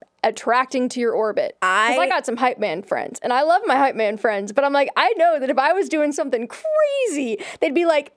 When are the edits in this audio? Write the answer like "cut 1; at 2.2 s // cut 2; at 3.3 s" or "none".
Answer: cut 1; at 1.6 s